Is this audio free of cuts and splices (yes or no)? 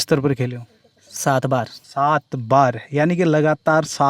yes